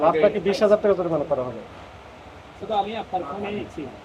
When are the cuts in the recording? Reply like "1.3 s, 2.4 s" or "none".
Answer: none